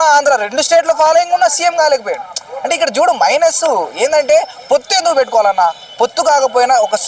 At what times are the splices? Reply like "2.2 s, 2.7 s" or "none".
none